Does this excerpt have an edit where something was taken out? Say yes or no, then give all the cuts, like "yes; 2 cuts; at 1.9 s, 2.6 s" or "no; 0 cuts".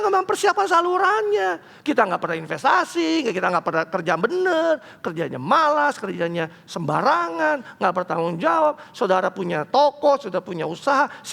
no; 0 cuts